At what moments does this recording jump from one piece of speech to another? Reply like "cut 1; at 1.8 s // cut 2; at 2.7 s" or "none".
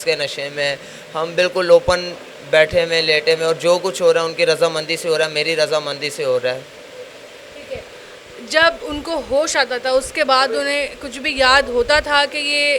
none